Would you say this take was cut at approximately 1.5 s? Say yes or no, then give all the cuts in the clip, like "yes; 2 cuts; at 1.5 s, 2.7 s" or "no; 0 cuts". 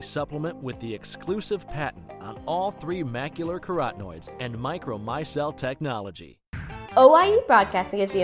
no; 1 cut; at 6.6 s